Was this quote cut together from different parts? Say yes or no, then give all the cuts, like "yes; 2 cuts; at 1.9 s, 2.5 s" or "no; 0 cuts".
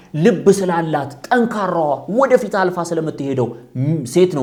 no; 0 cuts